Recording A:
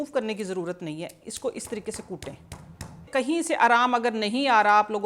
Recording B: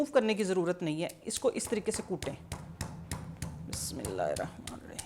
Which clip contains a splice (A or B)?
A